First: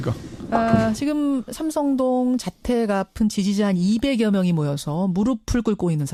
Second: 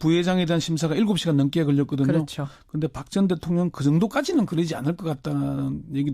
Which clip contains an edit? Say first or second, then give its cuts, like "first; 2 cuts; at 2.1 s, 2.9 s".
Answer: second; 1 cut; at 1.5 s